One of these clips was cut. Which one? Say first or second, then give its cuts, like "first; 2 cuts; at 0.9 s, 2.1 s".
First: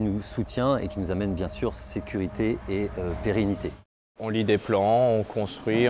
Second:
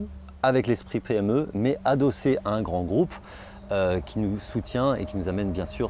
first; 1 cut; at 4.0 s